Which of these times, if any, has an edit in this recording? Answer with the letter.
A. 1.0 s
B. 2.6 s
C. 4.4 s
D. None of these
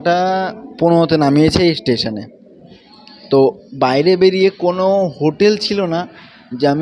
D